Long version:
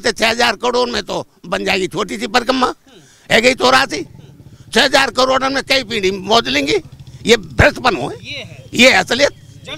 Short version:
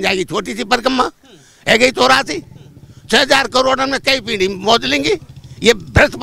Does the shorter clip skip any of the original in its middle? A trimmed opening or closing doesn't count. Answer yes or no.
no